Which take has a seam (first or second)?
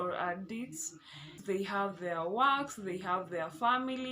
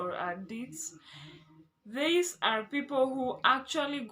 first